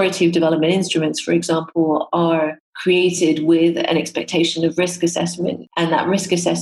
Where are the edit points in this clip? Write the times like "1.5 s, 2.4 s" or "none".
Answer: 2.7 s, 5.7 s